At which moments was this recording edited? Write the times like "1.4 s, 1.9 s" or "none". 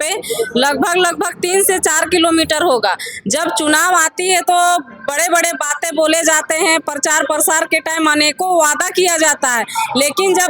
none